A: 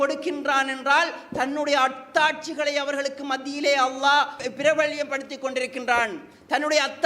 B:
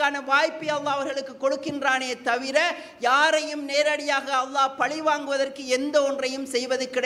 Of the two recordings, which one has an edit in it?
A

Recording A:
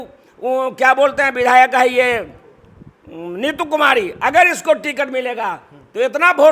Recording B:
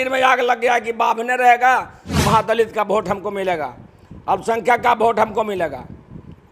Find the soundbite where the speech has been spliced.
B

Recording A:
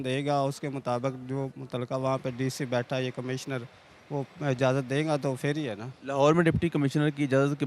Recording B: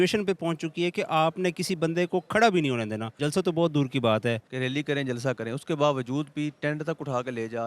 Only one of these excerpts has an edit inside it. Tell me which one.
B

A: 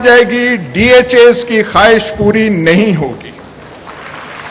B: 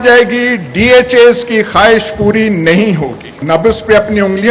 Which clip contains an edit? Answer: B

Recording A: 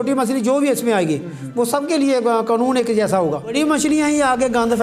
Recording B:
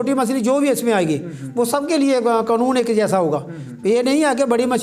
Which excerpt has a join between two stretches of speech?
A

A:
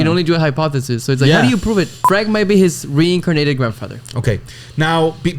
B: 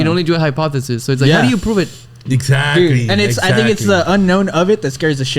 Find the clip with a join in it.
A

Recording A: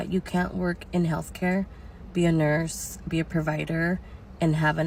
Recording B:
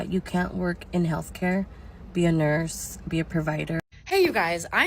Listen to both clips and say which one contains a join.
B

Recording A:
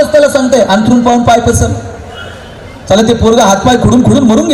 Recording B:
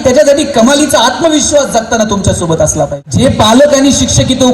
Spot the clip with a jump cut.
B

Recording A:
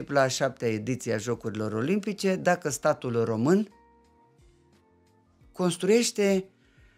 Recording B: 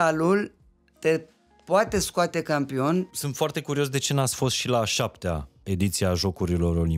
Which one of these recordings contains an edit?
B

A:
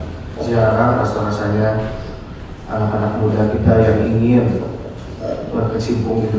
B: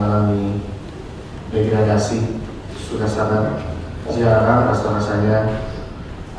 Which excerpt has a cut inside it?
B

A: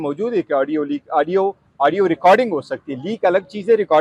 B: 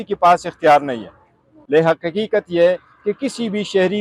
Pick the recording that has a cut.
B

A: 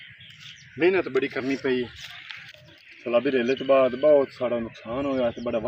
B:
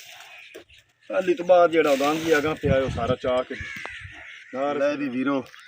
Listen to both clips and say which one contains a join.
B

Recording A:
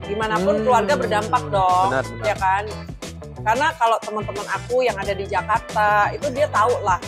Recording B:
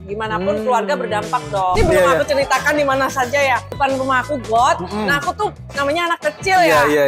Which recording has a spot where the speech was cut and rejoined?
B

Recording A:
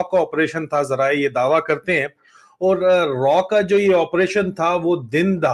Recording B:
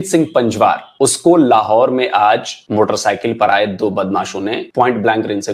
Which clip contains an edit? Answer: B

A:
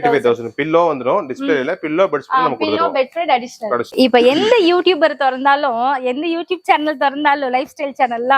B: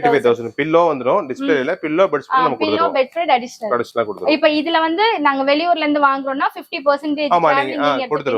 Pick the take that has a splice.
A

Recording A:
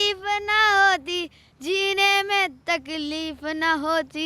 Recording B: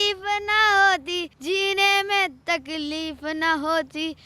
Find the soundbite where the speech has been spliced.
B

